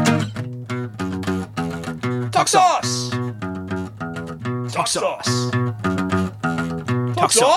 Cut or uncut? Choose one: uncut